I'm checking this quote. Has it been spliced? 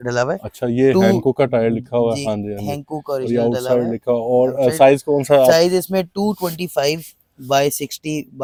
no; 0 cuts

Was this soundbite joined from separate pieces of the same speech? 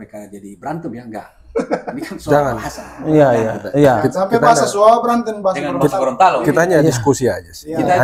no; 0 cuts

